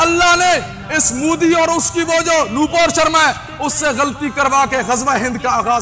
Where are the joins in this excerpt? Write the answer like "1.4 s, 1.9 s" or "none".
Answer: none